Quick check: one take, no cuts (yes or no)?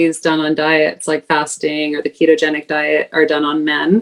yes